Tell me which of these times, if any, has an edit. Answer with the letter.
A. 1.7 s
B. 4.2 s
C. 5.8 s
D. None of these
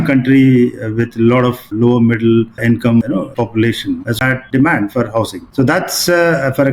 B